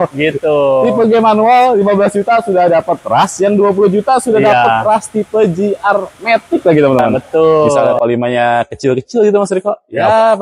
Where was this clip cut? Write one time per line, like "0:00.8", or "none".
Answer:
0:07.6

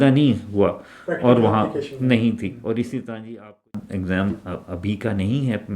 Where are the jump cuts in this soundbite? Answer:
0:03.7

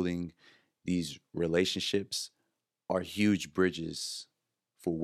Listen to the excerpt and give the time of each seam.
none

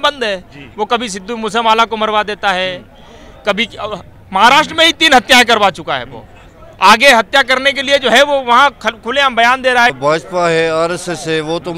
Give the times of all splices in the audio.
0:10.0

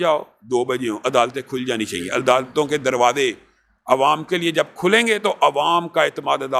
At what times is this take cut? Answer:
none

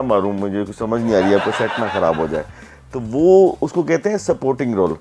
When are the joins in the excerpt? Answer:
none

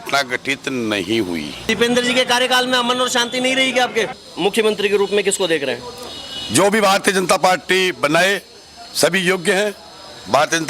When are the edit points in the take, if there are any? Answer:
0:01.6
0:04.2

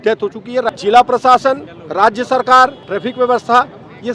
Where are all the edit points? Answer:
0:00.7
0:01.8
0:02.8

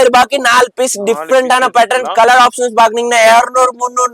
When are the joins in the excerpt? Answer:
none

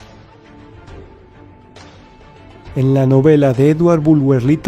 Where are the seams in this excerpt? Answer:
0:02.6

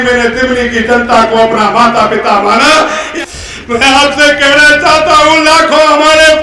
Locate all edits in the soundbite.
0:03.0

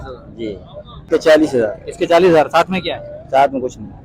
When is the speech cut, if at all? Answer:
0:00.9

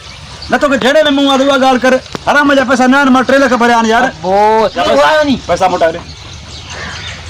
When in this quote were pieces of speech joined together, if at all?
0:04.8

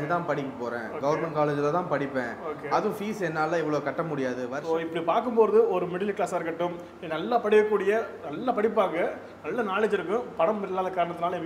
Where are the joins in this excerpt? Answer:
0:04.6

